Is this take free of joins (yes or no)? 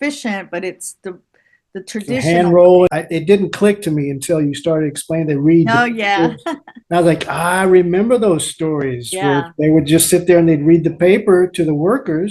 no